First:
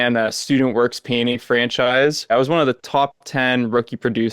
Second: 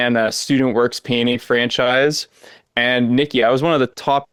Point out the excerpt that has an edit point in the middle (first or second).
first